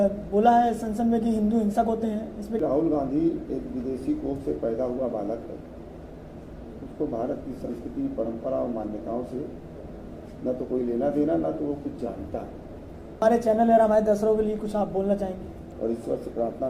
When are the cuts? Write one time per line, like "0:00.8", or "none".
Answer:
0:02.6
0:13.2
0:15.6